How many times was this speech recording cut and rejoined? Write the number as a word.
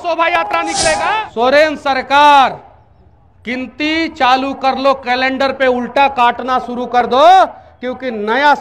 one